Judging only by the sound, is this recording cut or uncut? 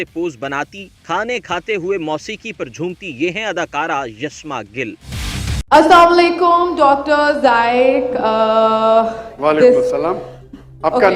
cut